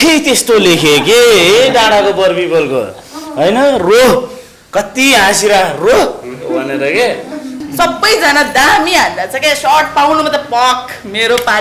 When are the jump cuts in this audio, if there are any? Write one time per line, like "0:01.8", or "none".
0:07.5